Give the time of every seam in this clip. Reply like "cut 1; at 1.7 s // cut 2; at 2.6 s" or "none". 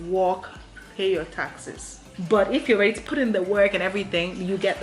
cut 1; at 2.2 s